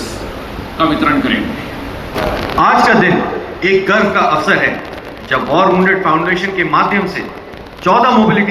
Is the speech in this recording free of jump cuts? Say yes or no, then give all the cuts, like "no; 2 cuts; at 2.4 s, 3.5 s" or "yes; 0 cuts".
no; 1 cut; at 2.1 s